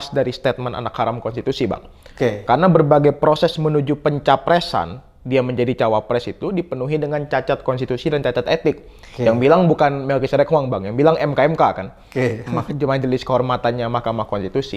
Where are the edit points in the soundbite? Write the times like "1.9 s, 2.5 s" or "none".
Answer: none